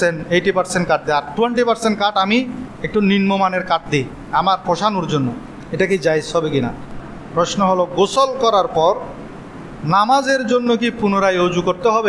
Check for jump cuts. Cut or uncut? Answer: cut